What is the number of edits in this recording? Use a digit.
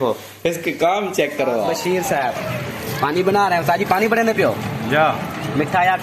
1